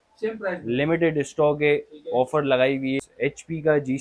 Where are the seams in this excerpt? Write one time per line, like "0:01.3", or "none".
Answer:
0:03.0